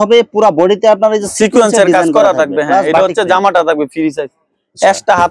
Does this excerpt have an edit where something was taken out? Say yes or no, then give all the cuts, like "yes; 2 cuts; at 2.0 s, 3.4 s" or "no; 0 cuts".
no; 0 cuts